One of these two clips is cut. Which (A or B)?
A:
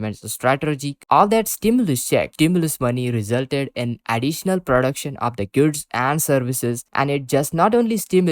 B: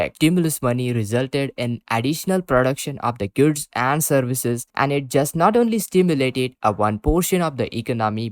A